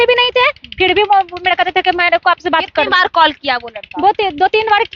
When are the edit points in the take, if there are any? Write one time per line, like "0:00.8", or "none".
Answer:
none

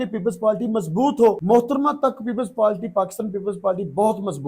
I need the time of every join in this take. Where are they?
0:01.4

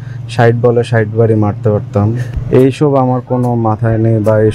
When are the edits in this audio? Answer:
0:02.2

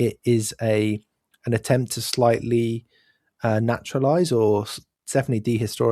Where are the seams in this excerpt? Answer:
none

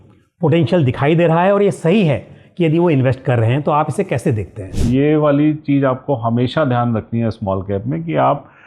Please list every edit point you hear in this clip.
0:04.8

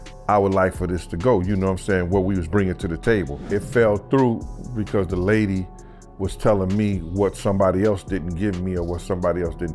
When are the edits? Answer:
0:03.5

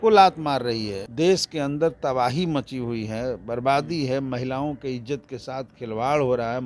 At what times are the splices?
0:01.0

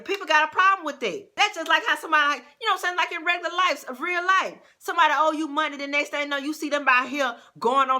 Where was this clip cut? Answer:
0:01.2

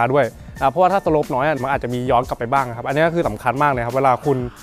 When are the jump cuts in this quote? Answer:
none

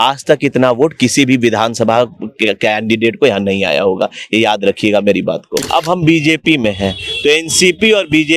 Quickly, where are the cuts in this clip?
0:05.6

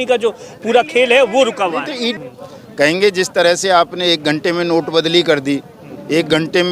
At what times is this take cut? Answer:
0:02.1

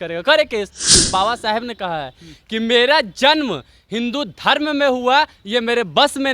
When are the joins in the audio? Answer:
0:01.0

